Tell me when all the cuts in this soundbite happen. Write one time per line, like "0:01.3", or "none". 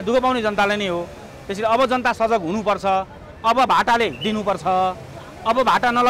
none